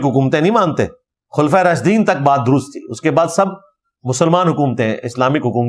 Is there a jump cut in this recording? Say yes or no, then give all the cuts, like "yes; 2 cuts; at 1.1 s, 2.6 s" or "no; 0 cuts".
no; 0 cuts